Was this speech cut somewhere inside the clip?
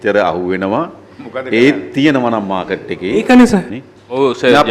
yes; 1 cut; at 3.8 s

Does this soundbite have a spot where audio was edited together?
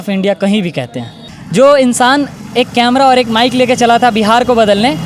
yes; 1 cut; at 1.2 s

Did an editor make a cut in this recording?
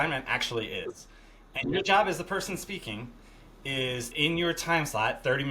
yes; 1 cut; at 4.1 s

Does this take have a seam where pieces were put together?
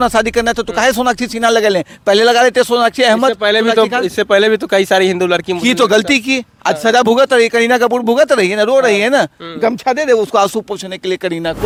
no; 0 cuts

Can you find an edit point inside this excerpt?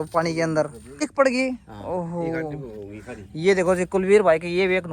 yes; 1 cut; at 1.0 s

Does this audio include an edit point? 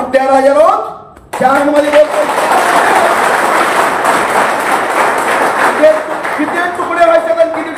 no; 0 cuts

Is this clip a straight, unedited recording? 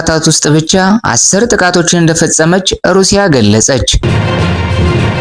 no; 1 cut; at 4.0 s

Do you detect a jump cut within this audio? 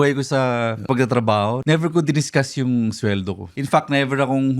yes; 3 cuts; at 0.8 s, 1.6 s, 3.5 s

